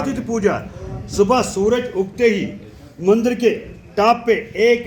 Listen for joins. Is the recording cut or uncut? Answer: uncut